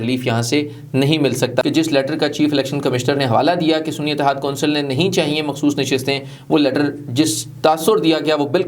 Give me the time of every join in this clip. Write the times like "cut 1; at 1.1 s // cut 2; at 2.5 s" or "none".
cut 1; at 1.6 s